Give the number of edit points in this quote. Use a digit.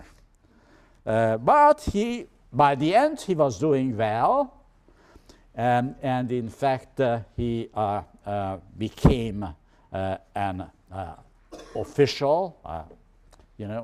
1